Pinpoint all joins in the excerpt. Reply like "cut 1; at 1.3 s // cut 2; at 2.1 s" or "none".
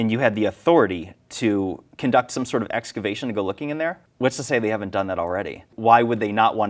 cut 1; at 1.9 s // cut 2; at 4.0 s // cut 3; at 5.7 s